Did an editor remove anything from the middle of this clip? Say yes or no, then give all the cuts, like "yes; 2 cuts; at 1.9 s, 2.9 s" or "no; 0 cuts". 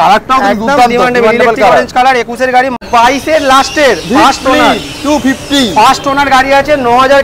yes; 1 cut; at 2.8 s